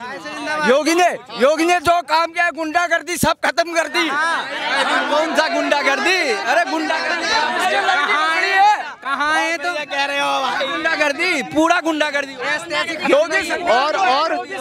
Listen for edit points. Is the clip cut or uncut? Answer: uncut